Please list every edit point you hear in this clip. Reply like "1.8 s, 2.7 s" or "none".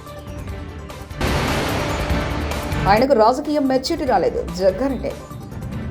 1.2 s